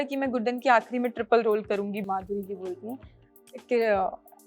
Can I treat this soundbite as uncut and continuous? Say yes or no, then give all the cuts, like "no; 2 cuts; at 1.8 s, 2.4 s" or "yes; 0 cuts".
no; 1 cut; at 2.0 s